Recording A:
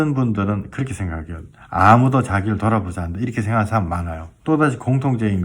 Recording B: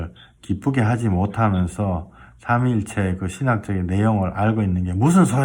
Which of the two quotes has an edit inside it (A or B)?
A